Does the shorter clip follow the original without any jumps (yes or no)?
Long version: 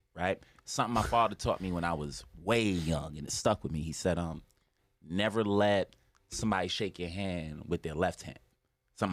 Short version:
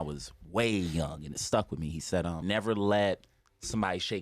no